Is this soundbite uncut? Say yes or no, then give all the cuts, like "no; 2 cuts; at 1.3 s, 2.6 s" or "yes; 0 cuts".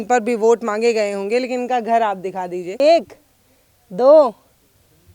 no; 1 cut; at 2.8 s